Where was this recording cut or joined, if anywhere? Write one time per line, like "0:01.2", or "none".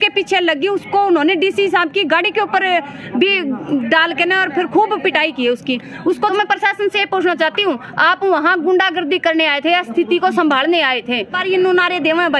0:06.3
0:11.4